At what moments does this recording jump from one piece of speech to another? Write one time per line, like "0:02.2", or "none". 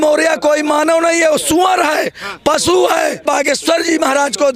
0:03.2